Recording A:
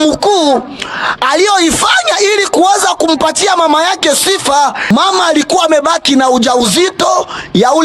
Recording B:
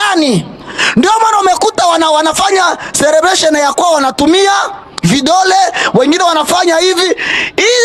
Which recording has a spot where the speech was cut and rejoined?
A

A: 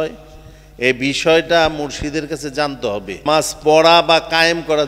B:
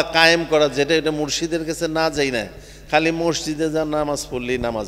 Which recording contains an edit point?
A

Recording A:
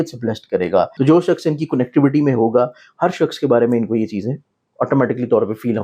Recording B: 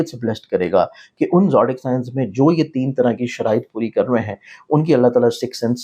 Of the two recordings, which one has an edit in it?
A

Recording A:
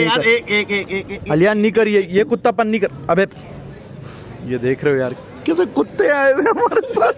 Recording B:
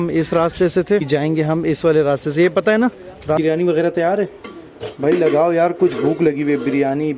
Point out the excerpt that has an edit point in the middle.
B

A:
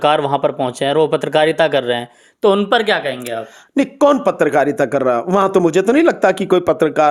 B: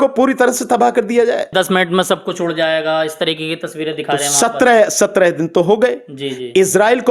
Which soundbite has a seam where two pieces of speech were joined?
B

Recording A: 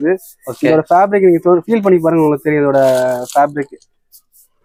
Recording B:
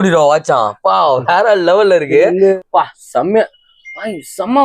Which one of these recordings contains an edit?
B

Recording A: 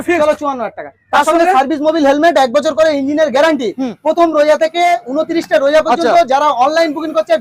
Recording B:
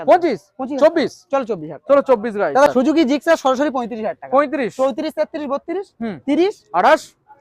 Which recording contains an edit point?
B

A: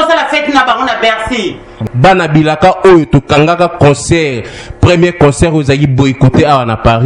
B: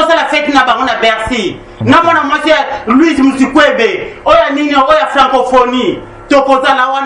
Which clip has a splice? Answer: A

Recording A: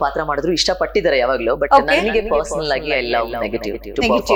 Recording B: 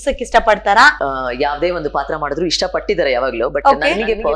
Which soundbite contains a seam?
B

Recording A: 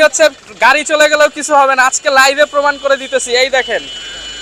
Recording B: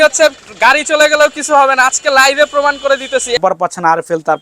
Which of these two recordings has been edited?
B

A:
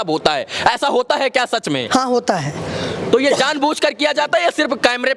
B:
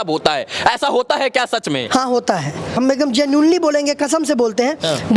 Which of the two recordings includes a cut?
B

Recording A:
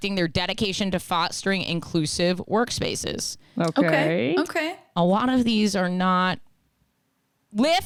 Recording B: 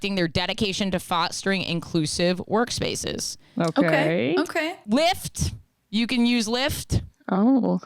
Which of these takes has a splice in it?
B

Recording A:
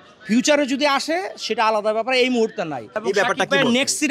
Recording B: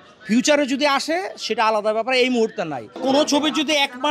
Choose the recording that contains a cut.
B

